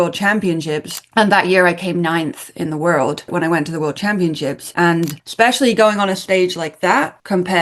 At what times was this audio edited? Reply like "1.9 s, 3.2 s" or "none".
3.2 s, 4.6 s

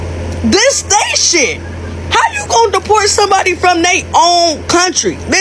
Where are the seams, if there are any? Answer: none

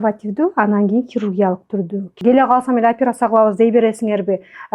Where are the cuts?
2.1 s

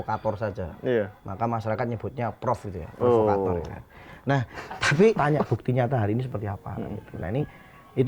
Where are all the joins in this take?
5.2 s

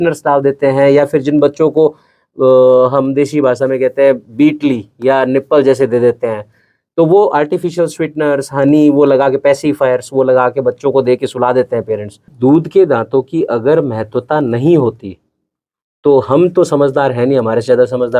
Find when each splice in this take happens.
12.3 s

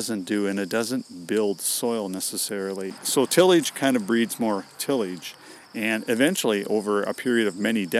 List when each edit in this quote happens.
3.0 s

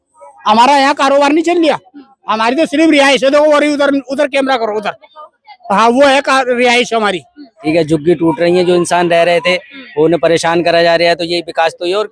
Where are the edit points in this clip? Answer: 7.6 s

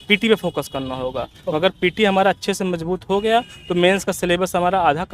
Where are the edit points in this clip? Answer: none

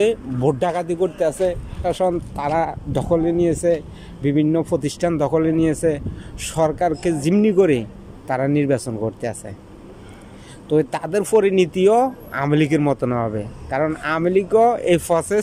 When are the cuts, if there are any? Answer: 1.7 s

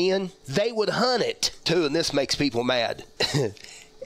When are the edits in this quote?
1.6 s

